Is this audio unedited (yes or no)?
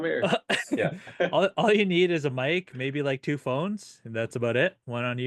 yes